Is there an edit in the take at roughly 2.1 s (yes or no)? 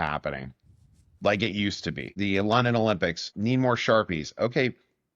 yes